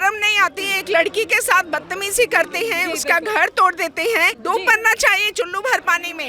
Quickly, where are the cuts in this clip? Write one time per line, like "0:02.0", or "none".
0:04.4